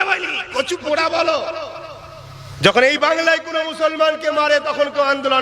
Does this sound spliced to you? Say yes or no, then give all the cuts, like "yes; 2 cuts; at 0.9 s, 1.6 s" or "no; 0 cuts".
no; 0 cuts